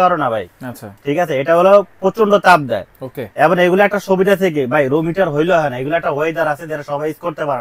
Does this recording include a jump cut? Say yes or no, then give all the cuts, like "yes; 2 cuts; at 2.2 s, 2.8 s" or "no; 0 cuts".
no; 0 cuts